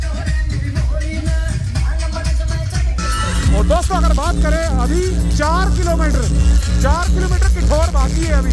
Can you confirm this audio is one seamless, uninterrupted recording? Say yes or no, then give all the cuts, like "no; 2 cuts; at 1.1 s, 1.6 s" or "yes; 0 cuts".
yes; 0 cuts